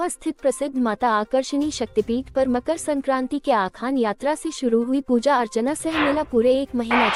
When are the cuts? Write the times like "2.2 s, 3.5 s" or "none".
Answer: none